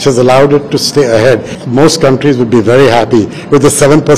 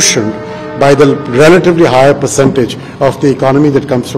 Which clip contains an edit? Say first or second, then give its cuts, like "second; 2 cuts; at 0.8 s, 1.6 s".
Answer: first; 1 cut; at 1.5 s